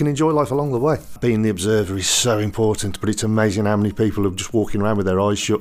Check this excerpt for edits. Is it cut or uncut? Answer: cut